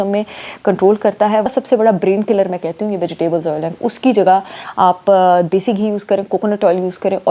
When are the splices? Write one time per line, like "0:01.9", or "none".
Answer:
0:01.5
0:03.7